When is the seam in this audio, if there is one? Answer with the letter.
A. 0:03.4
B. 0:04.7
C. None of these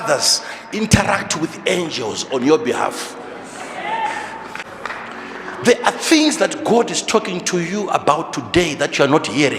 B